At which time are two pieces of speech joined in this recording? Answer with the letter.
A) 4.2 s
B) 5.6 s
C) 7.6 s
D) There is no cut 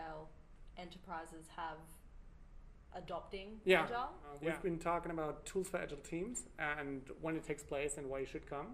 A